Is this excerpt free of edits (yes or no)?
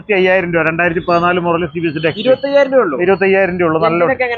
yes